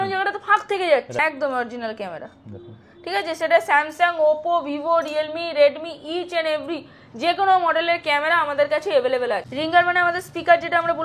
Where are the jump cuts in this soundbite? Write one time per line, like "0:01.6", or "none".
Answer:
0:01.1
0:09.5